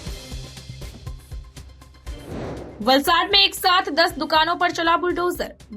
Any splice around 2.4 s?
yes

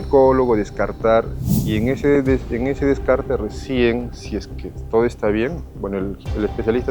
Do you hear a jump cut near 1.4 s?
yes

